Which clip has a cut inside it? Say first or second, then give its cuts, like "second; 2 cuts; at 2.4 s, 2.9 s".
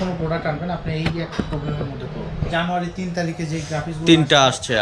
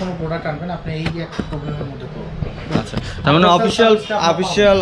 first; 1 cut; at 2.5 s